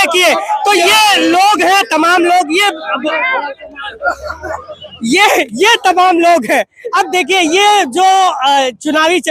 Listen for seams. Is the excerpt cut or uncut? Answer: uncut